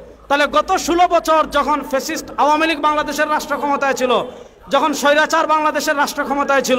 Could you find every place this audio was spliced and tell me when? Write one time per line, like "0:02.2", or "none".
none